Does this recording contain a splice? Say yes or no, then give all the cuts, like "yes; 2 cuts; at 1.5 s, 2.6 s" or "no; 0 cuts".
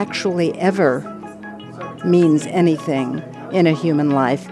no; 0 cuts